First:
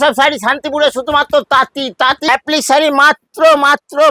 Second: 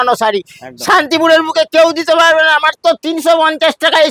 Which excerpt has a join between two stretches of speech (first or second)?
first